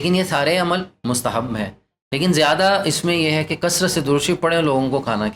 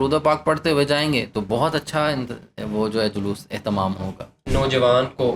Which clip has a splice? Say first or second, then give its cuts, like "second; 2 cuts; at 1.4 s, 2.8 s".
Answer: second; 1 cut; at 4.4 s